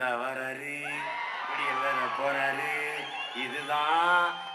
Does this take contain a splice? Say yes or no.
no